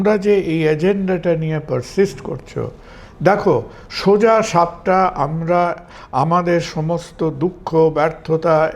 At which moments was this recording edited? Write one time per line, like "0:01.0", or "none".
none